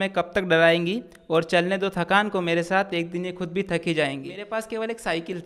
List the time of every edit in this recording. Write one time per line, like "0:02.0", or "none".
0:04.3